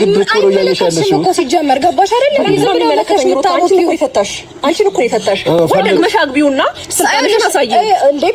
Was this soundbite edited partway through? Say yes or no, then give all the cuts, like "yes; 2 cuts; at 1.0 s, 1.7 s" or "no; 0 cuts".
no; 0 cuts